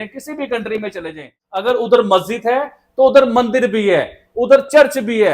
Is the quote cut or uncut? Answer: cut